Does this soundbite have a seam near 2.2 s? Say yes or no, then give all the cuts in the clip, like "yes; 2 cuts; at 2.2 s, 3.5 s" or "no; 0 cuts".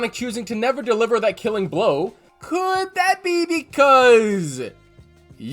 yes; 1 cut; at 2.2 s